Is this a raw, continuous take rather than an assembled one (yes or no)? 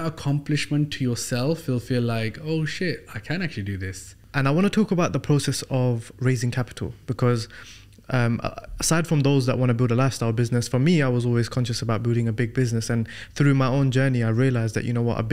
no